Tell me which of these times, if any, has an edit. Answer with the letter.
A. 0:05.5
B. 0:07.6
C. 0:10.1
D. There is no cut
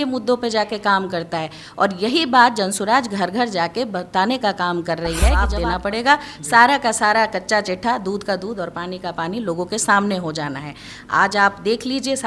A